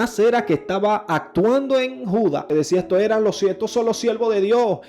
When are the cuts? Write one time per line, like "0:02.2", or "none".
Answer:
0:02.5